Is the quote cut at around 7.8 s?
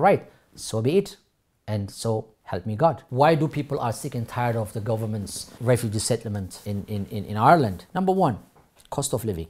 yes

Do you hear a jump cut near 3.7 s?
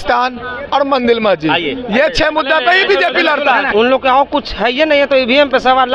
yes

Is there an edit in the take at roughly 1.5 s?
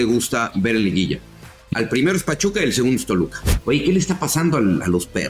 no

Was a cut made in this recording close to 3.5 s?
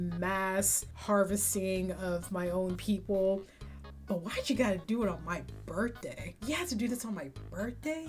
yes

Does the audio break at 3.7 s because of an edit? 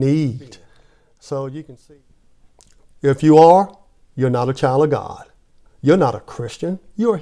no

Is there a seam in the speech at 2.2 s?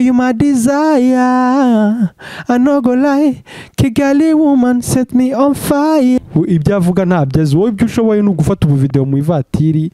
no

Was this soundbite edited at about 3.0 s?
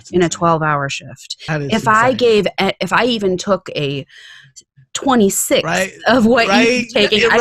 no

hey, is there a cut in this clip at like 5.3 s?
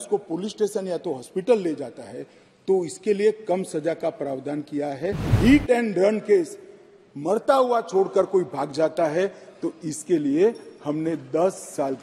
yes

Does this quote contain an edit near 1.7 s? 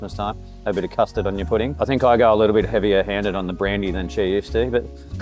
yes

